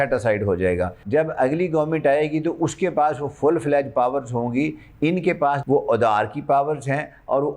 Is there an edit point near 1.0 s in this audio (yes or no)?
yes